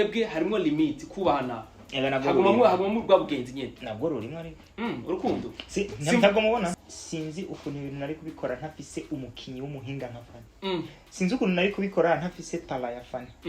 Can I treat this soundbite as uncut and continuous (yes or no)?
no